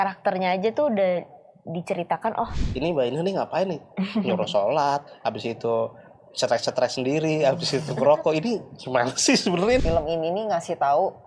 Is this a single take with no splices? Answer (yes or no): no